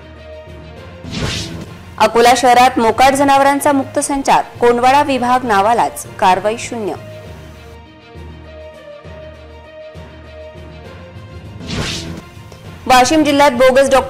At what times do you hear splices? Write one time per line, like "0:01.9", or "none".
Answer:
none